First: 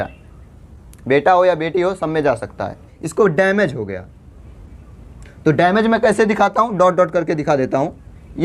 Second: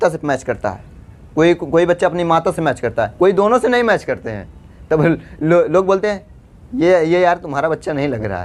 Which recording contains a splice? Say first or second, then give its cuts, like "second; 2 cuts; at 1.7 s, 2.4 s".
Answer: first; 1 cut; at 3.0 s